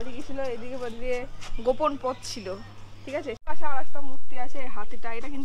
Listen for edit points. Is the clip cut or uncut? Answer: cut